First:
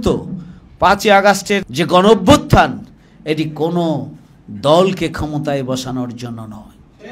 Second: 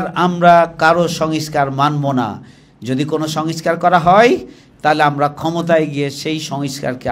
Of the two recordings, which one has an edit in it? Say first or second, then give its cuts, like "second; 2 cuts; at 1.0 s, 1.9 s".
first; 1 cut; at 1.7 s